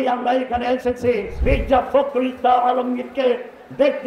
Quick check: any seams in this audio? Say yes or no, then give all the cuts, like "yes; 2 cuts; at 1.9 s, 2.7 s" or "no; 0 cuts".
yes; 1 cut; at 1.3 s